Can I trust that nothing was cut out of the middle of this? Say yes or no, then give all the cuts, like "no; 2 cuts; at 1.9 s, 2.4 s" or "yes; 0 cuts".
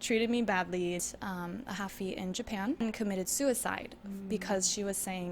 no; 2 cuts; at 1.0 s, 2.8 s